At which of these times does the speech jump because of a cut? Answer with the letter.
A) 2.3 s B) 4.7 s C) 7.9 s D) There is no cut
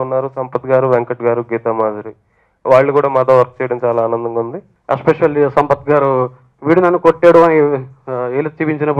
B